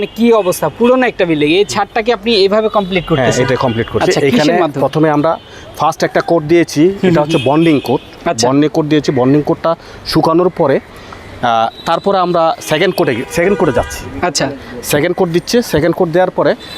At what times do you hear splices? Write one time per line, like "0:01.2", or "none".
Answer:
none